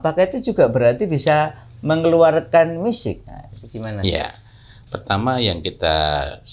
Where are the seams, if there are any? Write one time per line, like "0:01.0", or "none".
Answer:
none